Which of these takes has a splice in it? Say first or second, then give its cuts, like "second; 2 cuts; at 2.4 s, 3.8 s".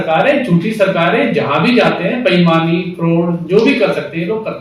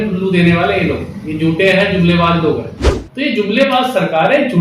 second; 1 cut; at 2.9 s